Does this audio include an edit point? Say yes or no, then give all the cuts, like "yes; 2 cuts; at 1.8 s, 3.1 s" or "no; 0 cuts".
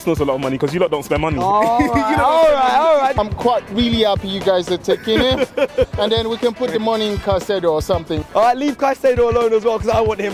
yes; 2 cuts; at 3.2 s, 8.2 s